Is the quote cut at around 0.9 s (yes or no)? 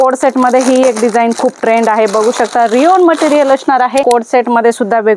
no